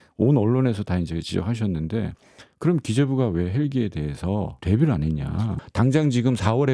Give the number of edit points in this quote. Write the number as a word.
two